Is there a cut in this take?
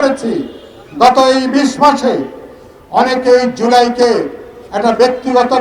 no; 0 cuts

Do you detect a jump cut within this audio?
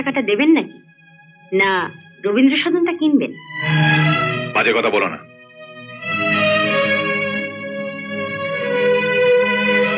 no; 0 cuts

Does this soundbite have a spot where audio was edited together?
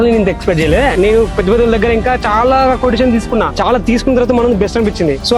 no; 0 cuts

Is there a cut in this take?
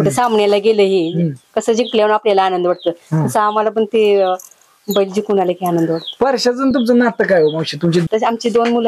no; 0 cuts

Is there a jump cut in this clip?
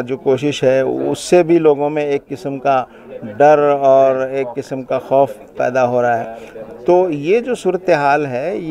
no; 0 cuts

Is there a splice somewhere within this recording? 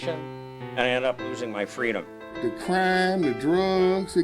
yes; 1 cut; at 2.3 s

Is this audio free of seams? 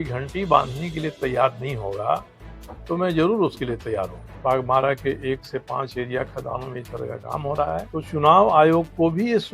no; 2 cuts; at 4.2 s, 7.9 s

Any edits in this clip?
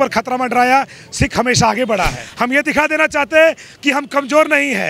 yes; 1 cut; at 2.2 s

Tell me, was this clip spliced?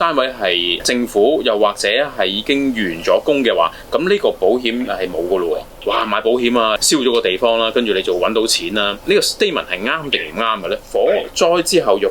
yes; 4 cuts; at 0.8 s, 5.7 s, 6.8 s, 10.8 s

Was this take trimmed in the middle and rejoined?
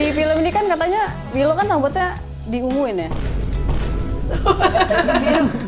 yes; 1 cut; at 1.2 s

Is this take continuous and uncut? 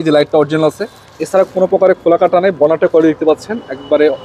yes; 0 cuts

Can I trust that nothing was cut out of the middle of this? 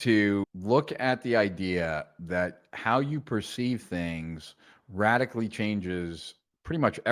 yes; 0 cuts

